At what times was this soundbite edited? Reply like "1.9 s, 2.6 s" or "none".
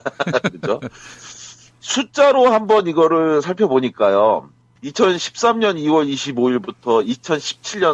4.0 s